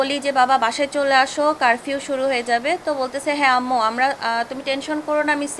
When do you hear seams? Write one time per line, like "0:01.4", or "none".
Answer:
none